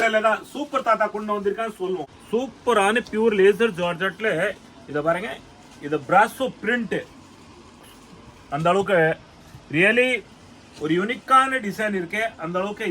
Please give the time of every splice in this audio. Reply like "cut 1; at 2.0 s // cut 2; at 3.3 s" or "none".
cut 1; at 2.1 s